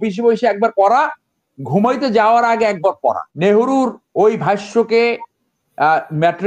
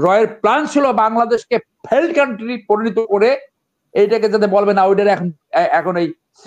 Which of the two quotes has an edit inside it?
first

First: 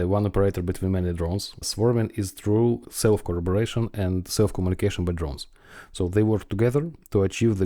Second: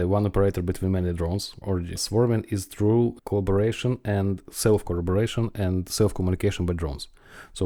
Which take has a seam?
first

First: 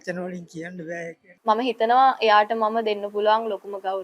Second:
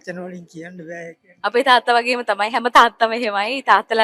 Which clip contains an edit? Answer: first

